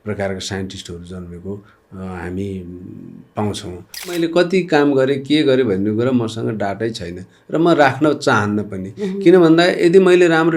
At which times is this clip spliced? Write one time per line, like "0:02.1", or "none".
0:04.2

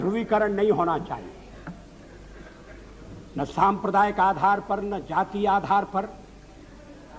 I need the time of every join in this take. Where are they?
none

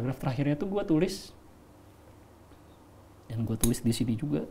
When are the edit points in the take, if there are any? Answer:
none

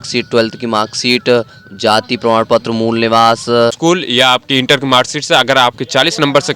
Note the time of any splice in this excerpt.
0:03.8

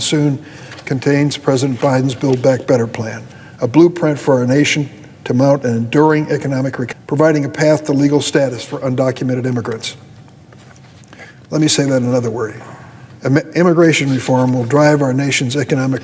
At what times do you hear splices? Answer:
0:06.8

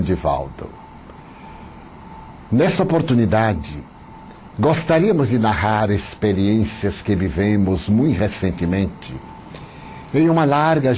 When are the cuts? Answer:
0:06.5

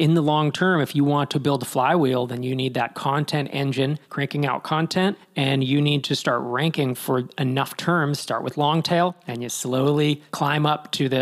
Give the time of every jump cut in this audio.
0:04.0
0:05.2
0:10.3

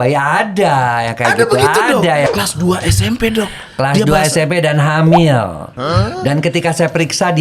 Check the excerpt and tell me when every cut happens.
0:02.3

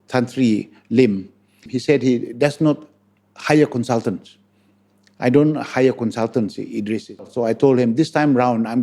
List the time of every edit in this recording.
0:01.7
0:07.2

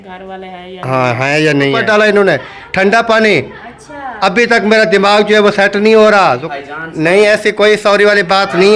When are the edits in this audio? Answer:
0:01.8
0:06.4

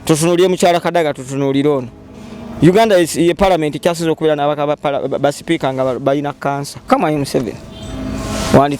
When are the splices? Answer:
0:06.8

